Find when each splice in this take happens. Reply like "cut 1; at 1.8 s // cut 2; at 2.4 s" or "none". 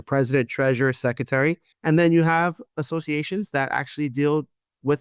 cut 1; at 1.7 s